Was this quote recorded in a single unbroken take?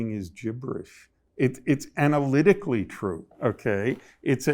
no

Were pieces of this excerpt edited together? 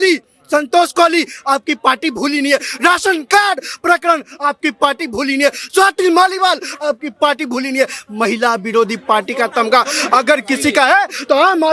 no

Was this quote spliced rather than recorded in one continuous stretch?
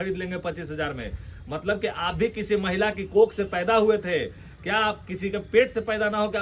no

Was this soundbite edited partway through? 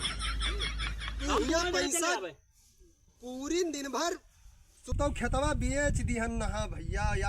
yes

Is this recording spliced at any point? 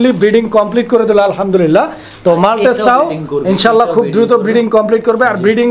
no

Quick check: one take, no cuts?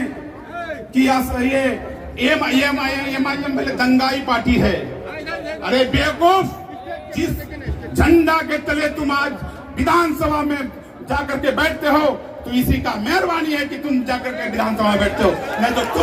yes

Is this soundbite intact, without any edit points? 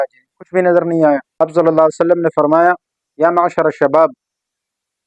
no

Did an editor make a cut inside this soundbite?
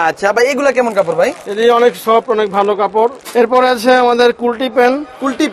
yes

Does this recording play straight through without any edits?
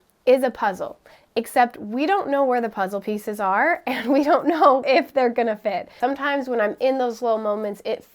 no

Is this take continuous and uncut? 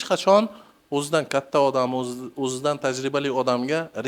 yes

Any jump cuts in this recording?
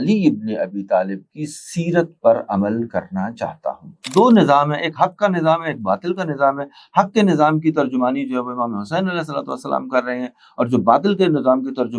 yes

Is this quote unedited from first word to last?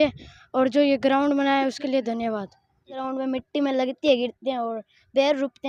no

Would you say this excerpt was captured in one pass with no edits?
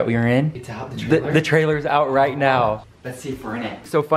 yes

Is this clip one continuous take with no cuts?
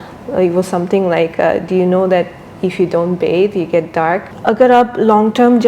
no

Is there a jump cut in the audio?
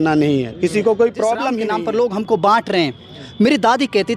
yes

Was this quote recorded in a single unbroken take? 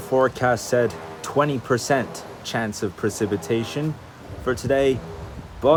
yes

